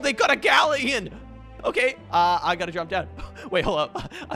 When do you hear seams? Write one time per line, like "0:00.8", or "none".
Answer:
0:01.5